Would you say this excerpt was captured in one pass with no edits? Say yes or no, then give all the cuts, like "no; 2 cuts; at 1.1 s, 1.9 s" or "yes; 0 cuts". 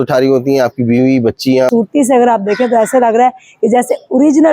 no; 1 cut; at 1.7 s